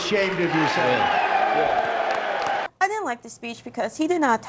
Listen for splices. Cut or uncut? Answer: cut